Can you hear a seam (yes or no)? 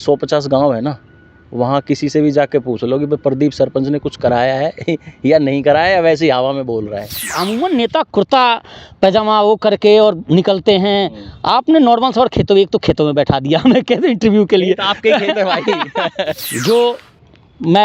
yes